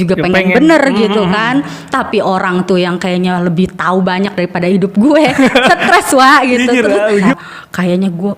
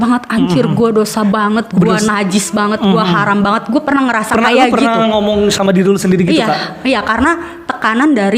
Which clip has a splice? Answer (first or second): first